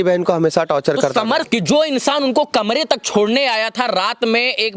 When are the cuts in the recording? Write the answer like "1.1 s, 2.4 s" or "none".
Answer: 1.4 s